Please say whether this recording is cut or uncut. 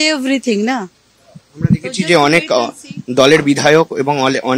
uncut